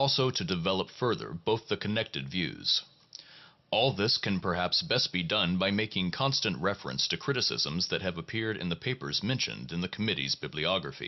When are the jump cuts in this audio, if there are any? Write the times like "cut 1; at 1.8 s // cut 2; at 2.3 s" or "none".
cut 1; at 3.1 s